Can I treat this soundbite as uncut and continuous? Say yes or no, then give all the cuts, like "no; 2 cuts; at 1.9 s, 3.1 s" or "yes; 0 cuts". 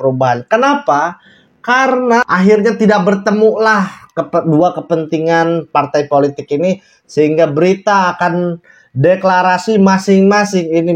no; 1 cut; at 2.2 s